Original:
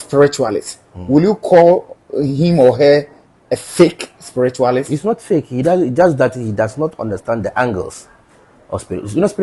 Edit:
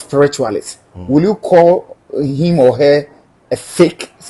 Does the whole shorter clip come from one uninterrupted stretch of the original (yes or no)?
yes